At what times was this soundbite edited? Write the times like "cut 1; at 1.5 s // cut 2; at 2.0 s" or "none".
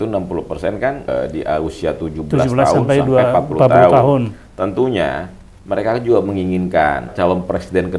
cut 1; at 1.1 s // cut 2; at 7.1 s